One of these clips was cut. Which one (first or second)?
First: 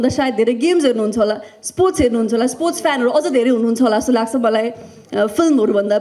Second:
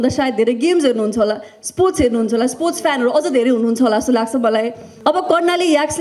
second